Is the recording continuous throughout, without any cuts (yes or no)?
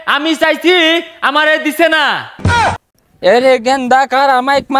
yes